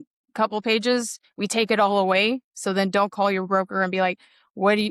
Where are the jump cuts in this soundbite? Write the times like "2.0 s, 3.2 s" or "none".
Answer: 1.2 s